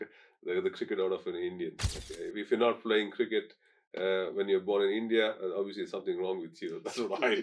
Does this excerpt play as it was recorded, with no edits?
yes; 0 cuts

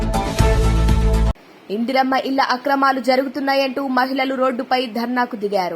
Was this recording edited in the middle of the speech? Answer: no; 0 cuts

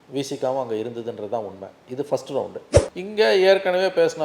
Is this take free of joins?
no; 1 cut; at 2.7 s

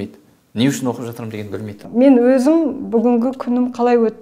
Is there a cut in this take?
yes; 1 cut; at 1.8 s

